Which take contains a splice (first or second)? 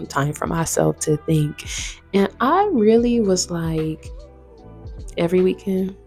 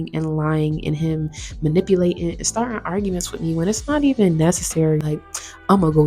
second